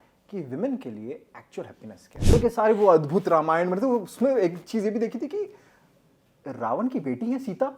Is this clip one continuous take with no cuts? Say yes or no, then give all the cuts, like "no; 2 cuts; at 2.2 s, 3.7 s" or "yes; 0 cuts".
no; 1 cut; at 2.3 s